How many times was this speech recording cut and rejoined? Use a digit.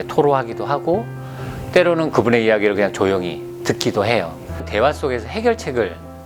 1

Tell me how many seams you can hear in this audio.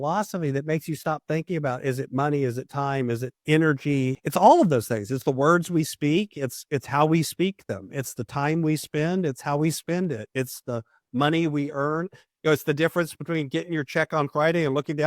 2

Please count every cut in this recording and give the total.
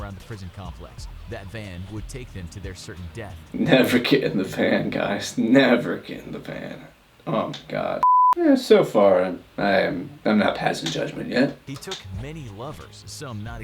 1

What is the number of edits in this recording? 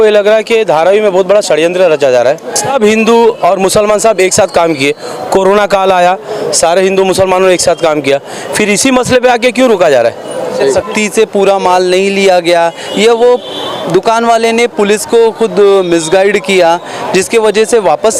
2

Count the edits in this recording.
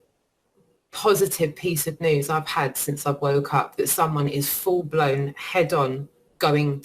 0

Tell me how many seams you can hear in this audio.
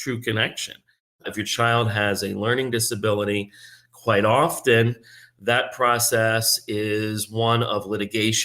1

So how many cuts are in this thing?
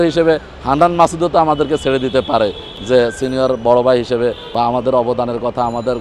1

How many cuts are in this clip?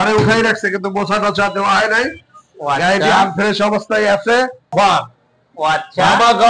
1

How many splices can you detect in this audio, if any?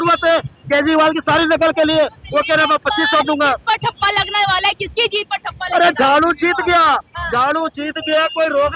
0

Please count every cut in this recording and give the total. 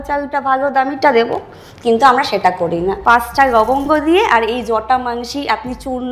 1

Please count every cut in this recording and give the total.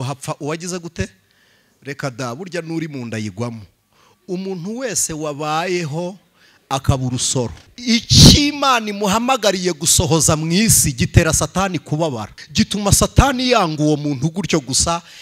2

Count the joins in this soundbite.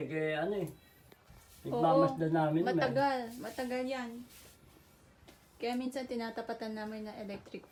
0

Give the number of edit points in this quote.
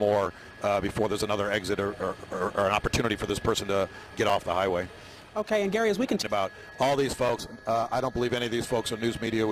1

